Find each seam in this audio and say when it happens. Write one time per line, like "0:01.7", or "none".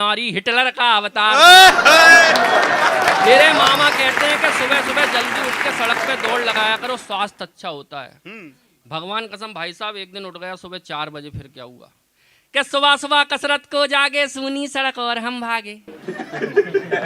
none